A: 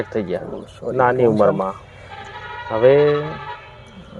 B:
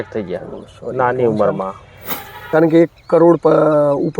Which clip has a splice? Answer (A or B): B